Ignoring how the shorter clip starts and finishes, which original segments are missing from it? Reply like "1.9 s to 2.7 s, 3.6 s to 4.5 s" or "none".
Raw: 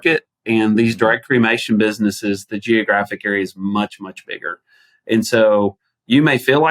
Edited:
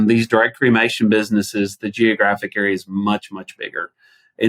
none